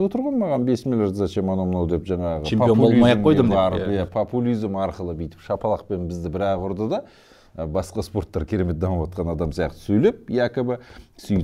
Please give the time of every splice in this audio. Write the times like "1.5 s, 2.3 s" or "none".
none